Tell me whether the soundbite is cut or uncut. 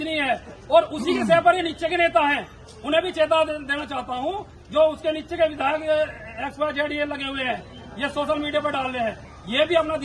uncut